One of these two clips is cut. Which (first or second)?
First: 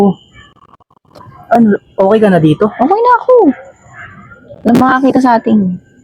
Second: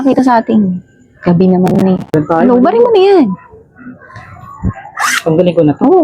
second